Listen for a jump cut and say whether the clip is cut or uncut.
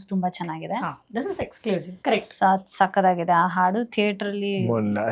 uncut